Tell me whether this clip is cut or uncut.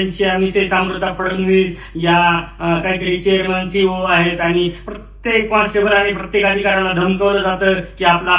uncut